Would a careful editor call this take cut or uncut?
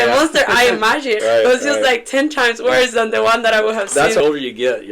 cut